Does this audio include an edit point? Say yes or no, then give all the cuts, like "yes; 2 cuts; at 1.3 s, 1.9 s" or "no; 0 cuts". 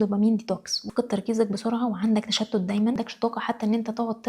yes; 2 cuts; at 0.8 s, 3.0 s